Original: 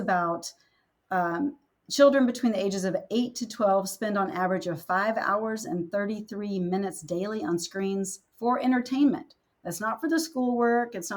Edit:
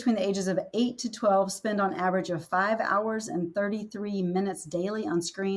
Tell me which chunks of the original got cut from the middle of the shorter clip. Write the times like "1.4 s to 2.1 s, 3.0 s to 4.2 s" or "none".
none

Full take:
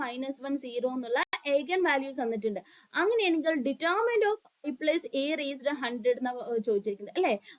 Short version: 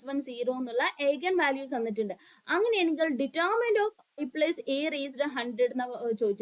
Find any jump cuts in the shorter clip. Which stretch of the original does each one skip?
1.3 s to 1.4 s

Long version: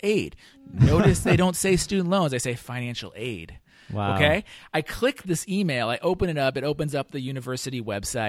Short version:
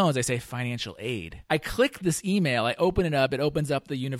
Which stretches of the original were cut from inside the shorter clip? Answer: 3.5 s to 4.6 s

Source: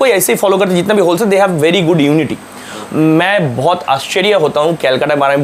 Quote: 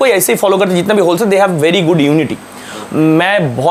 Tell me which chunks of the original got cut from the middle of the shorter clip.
none

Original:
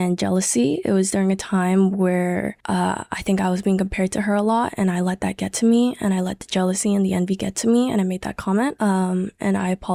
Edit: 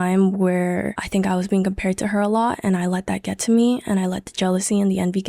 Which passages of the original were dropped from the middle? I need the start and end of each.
2.6 s to 3.1 s

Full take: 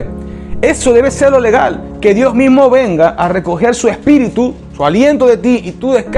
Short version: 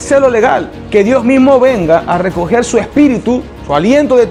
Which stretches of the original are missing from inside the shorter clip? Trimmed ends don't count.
none

